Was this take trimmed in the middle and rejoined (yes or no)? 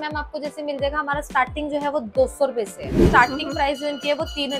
yes